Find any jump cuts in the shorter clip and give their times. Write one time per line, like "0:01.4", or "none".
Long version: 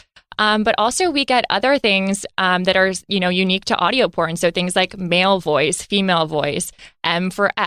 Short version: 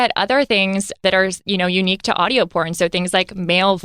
0:01.0